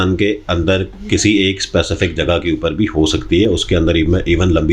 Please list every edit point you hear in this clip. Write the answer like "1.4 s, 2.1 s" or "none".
none